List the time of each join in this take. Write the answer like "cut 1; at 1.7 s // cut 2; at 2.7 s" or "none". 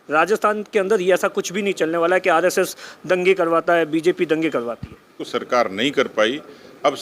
cut 1; at 5.2 s